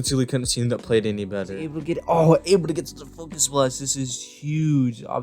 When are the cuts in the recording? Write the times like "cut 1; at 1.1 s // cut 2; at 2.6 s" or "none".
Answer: cut 1; at 1.7 s